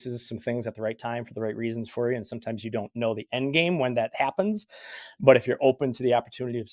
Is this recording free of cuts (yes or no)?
yes